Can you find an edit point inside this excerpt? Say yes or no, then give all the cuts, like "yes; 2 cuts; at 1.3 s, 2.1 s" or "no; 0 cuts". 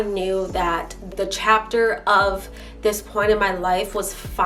yes; 1 cut; at 1.1 s